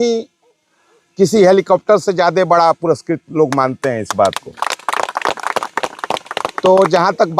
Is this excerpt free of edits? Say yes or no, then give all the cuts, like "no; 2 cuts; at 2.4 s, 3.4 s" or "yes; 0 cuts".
yes; 0 cuts